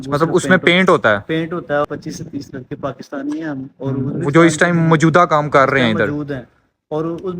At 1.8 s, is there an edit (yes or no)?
yes